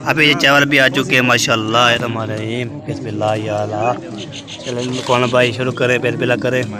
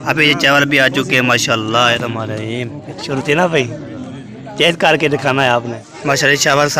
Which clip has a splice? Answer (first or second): second